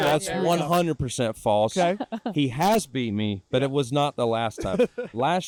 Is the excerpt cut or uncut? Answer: uncut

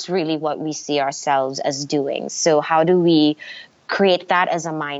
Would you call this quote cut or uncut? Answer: uncut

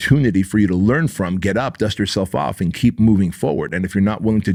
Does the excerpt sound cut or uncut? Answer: uncut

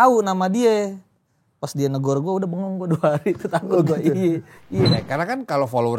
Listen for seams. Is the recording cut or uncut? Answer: cut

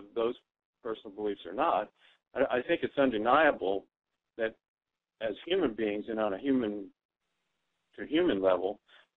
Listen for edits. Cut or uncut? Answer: cut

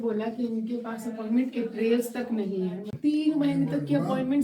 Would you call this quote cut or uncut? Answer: cut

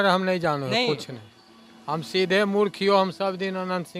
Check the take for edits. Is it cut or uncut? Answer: uncut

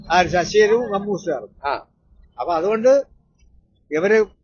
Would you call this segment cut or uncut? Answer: uncut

